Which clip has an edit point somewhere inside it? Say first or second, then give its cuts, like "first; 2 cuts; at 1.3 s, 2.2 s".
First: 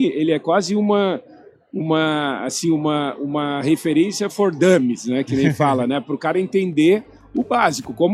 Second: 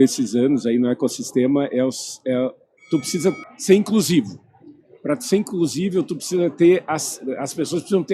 second; 1 cut; at 3.4 s